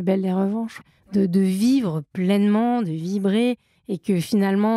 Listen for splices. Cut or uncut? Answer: cut